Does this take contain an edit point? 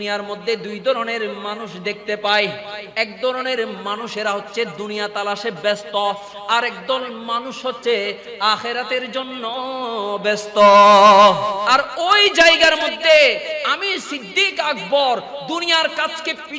yes; 1 cut; at 11.6 s

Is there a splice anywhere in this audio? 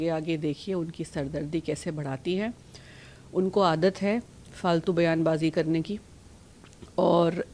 no; 0 cuts

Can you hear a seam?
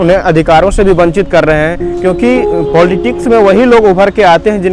yes; 1 cut; at 1.8 s

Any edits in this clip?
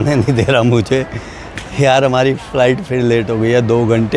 no; 0 cuts

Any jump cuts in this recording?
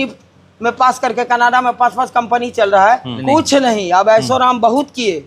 yes; 1 cut; at 3.1 s

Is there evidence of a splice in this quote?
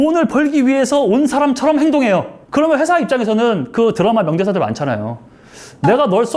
yes; 1 cut; at 2.4 s

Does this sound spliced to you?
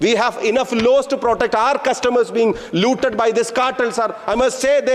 no; 0 cuts

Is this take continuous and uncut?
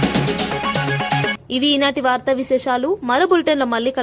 yes; 0 cuts

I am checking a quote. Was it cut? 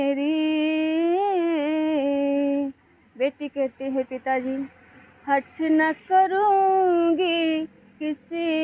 no; 0 cuts

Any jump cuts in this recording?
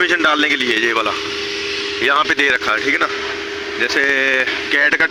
no; 0 cuts

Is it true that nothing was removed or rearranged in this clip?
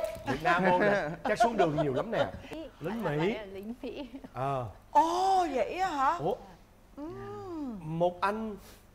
no; 1 cut; at 2.4 s

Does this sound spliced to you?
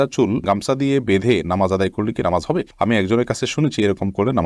no; 0 cuts

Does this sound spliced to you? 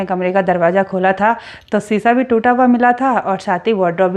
no; 0 cuts

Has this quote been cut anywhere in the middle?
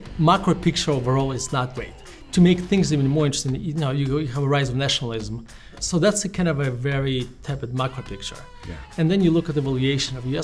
yes; 2 cuts; at 1.8 s, 5.8 s

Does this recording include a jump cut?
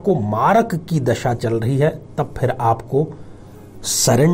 no; 0 cuts

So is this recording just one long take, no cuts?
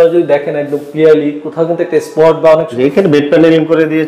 no; 1 cut; at 2.7 s

